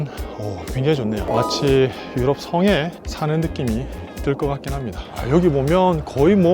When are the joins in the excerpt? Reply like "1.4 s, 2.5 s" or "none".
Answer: 1.2 s, 5.2 s